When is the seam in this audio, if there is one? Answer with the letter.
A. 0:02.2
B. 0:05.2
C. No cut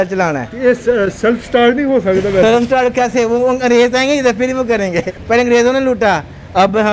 B